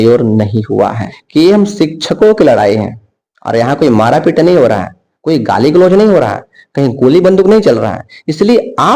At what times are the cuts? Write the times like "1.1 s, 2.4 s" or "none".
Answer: 1.1 s